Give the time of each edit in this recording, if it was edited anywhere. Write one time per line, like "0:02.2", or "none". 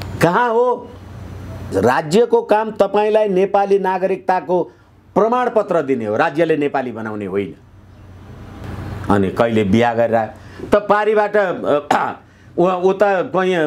none